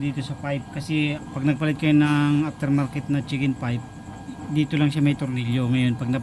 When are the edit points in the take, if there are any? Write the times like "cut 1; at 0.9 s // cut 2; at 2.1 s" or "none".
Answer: cut 1; at 1.3 s